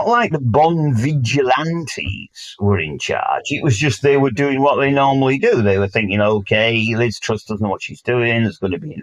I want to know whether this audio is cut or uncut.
uncut